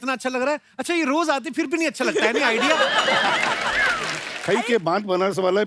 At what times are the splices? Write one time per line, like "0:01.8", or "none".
0:04.3